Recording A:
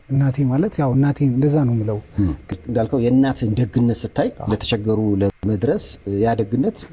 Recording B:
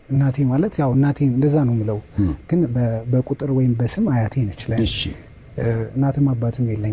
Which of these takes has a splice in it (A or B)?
A